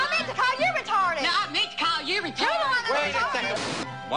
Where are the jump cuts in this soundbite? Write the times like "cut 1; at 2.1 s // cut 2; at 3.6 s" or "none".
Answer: cut 1; at 1.3 s